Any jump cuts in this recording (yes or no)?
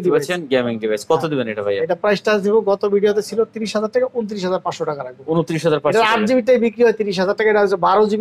no